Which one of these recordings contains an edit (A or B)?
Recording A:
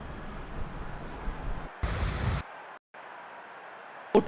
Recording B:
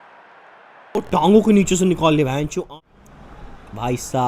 B